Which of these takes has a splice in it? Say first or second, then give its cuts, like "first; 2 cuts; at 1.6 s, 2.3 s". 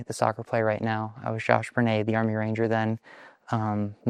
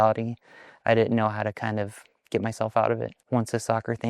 second; 1 cut; at 3.2 s